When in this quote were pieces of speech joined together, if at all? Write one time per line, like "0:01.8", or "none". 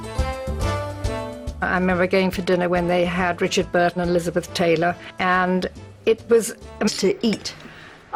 none